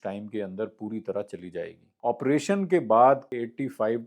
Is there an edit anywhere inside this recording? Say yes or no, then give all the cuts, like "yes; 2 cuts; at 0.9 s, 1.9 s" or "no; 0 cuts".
yes; 2 cuts; at 1.8 s, 3.4 s